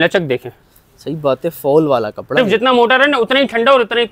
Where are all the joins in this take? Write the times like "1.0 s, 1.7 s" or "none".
2.4 s